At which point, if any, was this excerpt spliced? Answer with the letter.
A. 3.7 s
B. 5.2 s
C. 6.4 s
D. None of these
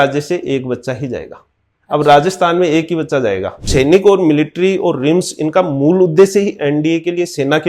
A